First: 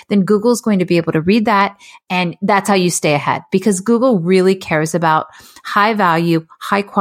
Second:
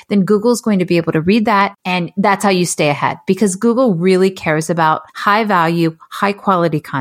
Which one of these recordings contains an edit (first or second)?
second